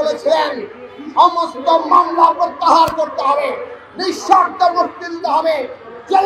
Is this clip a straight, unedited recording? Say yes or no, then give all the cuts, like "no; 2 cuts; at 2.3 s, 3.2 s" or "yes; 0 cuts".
yes; 0 cuts